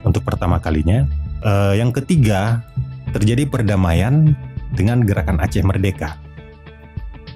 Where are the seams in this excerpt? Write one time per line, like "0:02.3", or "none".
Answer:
0:01.2